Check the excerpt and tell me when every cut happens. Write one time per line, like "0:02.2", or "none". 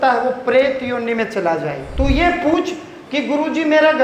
0:01.8

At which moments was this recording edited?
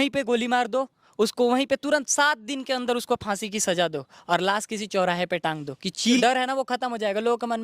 0:06.2

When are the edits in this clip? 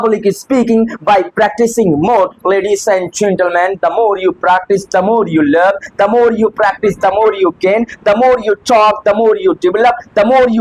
none

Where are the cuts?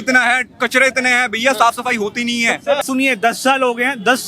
0:02.8

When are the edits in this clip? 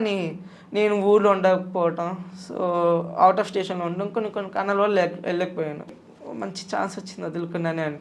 0:06.1

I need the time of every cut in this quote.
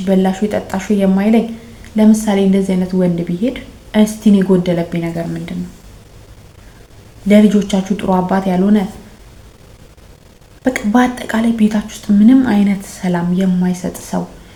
none

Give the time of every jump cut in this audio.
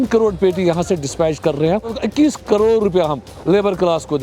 0:01.9

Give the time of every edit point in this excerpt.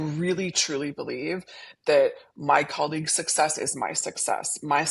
none

